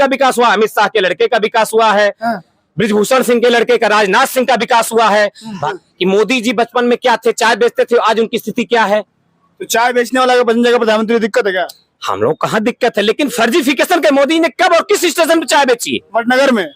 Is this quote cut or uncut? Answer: cut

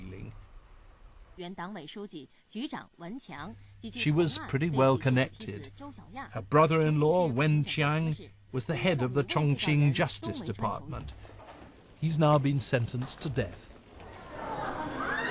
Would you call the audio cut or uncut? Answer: uncut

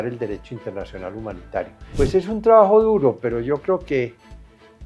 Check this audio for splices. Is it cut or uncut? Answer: cut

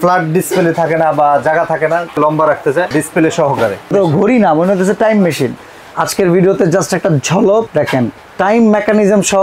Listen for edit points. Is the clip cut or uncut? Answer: cut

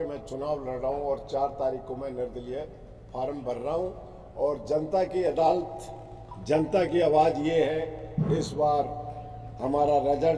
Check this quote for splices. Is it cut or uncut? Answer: uncut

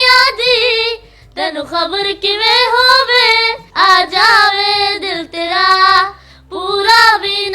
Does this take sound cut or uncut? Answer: uncut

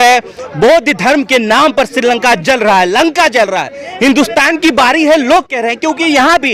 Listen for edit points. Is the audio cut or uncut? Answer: uncut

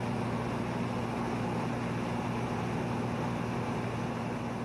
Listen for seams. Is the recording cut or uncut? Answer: uncut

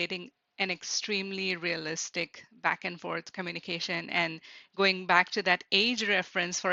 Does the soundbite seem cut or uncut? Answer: uncut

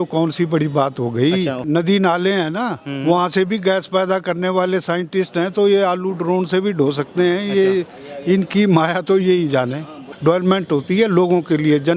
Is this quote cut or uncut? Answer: cut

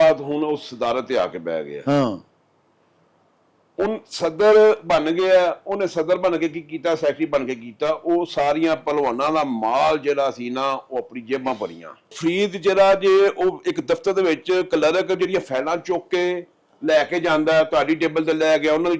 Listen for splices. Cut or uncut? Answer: cut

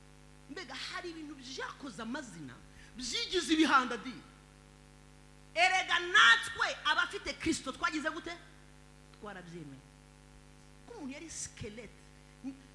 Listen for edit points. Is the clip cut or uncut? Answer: cut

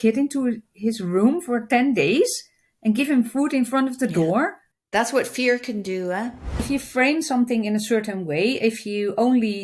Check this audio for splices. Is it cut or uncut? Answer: cut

